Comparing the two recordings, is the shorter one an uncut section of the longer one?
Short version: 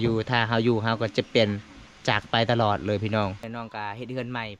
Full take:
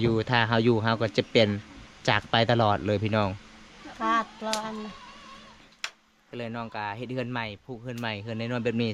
no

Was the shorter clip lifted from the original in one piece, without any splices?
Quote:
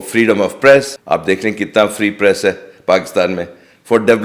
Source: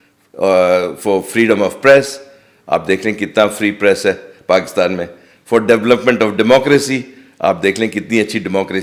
no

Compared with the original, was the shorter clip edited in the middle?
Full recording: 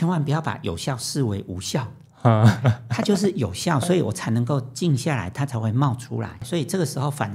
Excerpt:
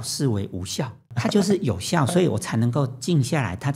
yes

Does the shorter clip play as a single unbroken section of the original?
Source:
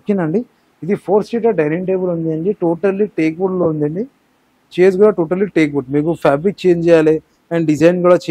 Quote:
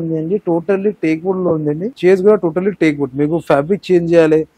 no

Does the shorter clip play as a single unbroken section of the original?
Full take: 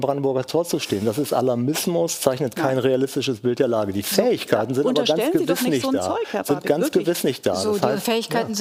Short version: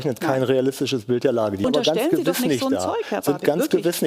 no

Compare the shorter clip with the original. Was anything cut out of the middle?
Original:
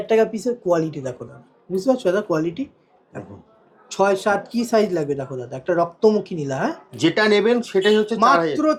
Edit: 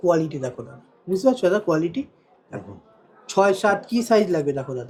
no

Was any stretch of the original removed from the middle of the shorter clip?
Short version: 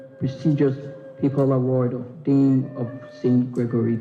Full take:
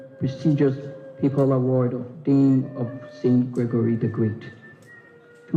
no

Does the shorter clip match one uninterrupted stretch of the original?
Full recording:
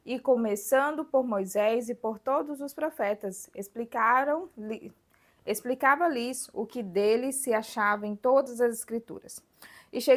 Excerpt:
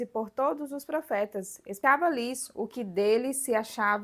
no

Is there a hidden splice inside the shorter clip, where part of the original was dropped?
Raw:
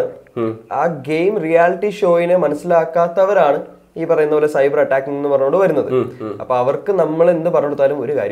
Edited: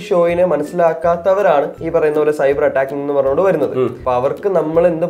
yes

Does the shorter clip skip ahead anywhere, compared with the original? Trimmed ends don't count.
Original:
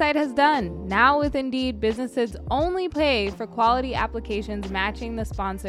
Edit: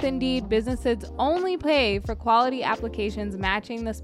no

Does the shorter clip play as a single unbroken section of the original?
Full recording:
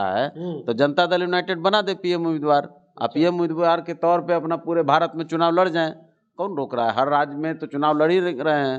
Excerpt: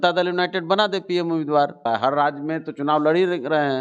no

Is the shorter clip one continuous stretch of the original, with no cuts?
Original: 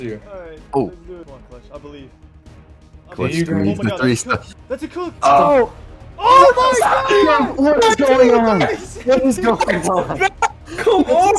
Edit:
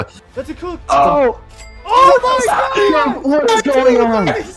yes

